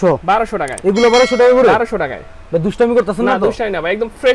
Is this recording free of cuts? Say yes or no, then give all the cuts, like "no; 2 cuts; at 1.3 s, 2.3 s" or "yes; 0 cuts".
yes; 0 cuts